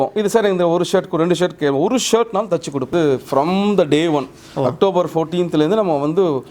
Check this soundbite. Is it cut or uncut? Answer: cut